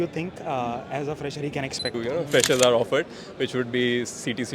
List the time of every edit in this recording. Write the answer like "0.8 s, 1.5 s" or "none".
2.0 s